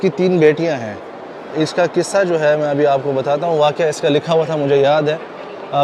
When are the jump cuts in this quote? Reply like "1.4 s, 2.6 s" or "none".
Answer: none